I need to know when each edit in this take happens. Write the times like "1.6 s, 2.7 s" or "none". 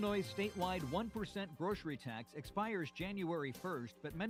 none